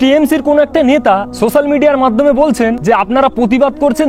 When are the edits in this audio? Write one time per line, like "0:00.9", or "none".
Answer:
0:01.3
0:02.8

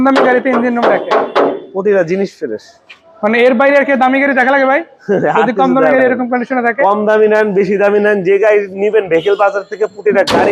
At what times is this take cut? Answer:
none

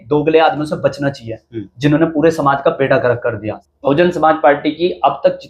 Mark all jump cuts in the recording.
0:03.5

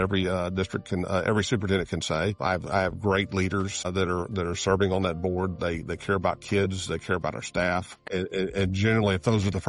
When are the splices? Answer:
0:02.4
0:03.9
0:08.0

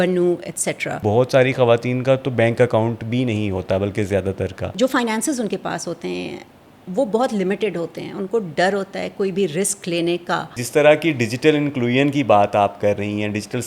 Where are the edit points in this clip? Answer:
0:01.0
0:04.7
0:10.6

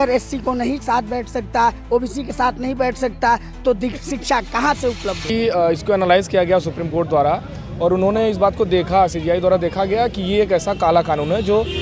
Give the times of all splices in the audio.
0:05.3

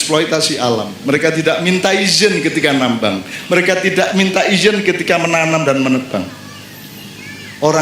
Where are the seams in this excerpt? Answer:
none

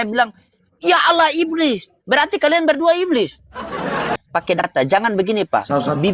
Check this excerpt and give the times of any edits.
0:04.1

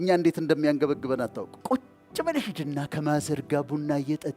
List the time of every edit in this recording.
0:01.5

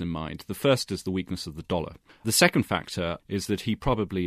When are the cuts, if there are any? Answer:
0:02.2
0:03.2

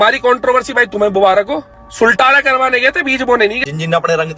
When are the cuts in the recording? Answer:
0:01.8
0:03.6

